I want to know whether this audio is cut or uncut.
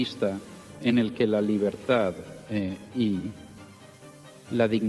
uncut